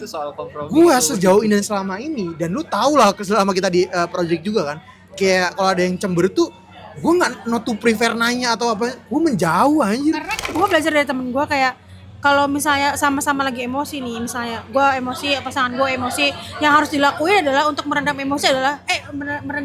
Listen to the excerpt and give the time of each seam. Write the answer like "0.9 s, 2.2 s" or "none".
10.4 s